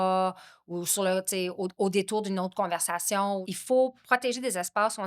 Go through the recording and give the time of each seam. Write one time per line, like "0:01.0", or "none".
0:03.4